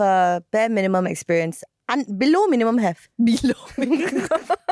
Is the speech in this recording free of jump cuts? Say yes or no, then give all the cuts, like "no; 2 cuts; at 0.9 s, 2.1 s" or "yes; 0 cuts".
yes; 0 cuts